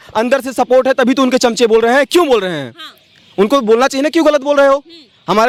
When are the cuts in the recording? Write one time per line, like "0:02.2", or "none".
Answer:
none